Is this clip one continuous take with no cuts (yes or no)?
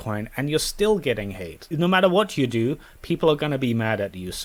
yes